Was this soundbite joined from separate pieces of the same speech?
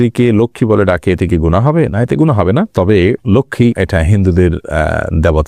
no; 0 cuts

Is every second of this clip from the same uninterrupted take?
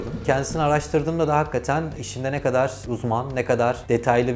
yes; 0 cuts

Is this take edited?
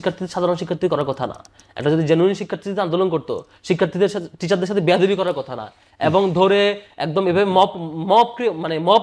no; 0 cuts

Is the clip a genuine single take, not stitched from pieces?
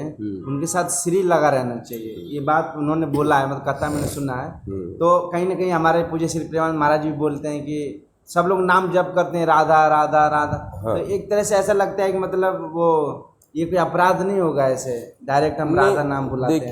yes; 0 cuts

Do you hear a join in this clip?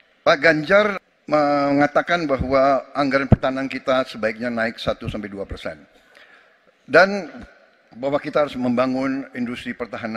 yes; 1 cut; at 1.0 s

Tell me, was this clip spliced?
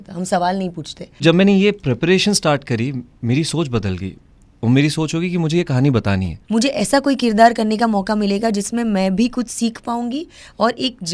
yes; 2 cuts; at 1.2 s, 6.3 s

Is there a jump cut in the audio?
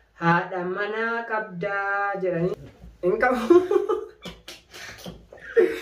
yes; 1 cut; at 2.6 s

